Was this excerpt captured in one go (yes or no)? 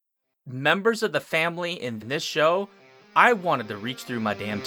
yes